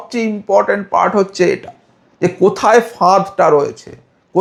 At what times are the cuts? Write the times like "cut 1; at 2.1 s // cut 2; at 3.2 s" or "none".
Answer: none